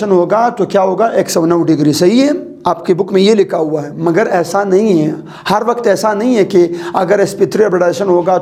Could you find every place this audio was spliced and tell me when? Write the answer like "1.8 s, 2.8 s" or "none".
none